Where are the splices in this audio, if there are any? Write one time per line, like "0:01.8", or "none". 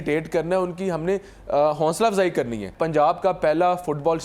0:02.7